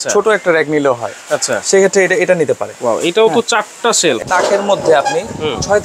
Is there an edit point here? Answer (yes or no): yes